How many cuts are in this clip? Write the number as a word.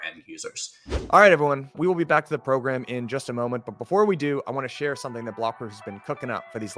one